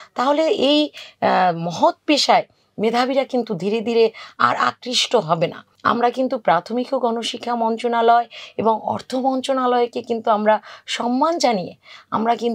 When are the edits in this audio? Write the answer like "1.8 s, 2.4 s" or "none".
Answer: 5.7 s